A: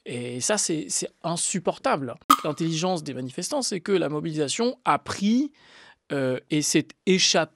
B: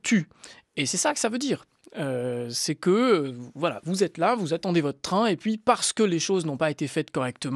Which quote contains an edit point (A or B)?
A